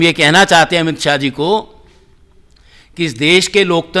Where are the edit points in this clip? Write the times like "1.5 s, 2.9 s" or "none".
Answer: none